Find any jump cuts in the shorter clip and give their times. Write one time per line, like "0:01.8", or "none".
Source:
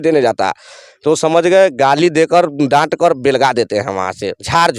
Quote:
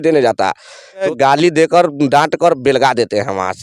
0:01.1

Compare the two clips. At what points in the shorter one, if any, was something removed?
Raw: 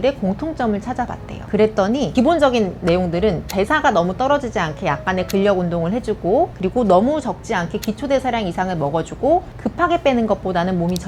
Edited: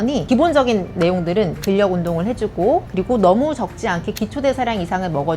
0:01.6

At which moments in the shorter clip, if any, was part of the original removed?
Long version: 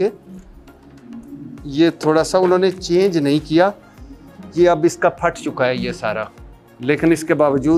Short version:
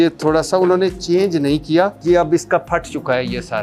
0:02.0

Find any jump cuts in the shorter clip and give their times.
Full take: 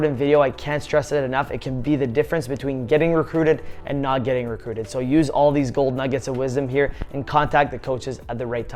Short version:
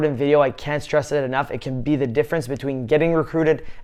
none

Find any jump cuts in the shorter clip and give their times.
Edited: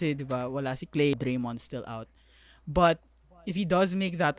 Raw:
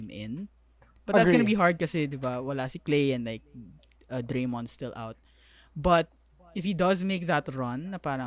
0:01.1

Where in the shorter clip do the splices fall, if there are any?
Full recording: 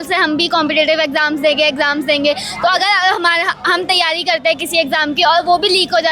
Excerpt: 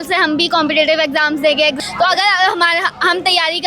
0:01.8

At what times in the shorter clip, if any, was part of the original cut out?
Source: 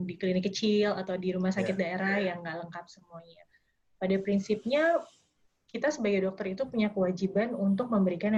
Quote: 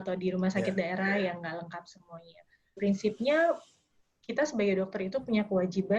0:02.8

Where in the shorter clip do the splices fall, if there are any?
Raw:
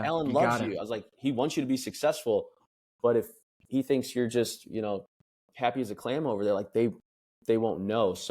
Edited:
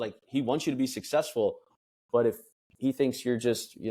none

